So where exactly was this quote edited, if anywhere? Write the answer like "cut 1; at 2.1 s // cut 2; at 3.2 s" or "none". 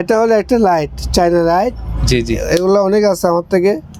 none